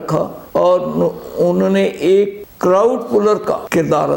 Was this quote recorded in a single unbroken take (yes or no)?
yes